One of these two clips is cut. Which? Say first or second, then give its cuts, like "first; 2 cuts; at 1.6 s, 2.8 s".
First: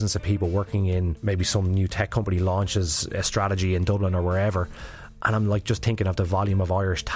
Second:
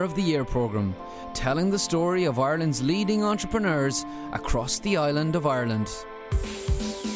first; 1 cut; at 1.2 s